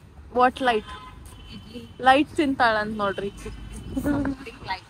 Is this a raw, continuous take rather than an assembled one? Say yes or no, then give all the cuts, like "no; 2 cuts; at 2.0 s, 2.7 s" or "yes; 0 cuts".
yes; 0 cuts